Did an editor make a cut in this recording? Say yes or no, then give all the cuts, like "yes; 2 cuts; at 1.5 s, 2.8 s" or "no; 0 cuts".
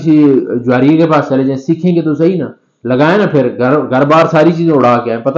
no; 0 cuts